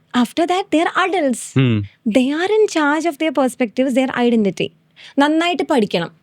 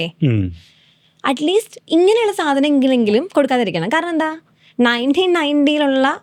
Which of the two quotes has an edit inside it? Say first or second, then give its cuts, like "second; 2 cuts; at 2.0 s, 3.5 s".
first; 1 cut; at 5.0 s